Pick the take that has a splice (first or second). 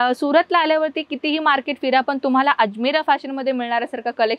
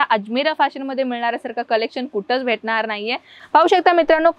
second